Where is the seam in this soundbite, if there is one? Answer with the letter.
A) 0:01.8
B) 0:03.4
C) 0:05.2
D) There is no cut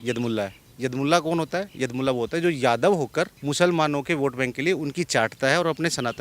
B